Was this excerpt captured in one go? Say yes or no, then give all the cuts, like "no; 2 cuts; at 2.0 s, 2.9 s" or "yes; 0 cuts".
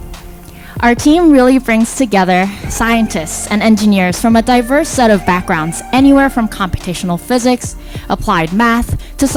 yes; 0 cuts